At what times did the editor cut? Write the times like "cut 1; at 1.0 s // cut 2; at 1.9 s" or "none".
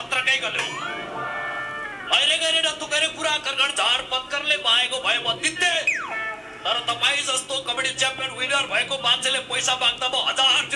none